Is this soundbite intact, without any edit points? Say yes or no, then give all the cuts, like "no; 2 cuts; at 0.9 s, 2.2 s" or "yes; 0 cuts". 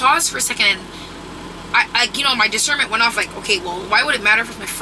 yes; 0 cuts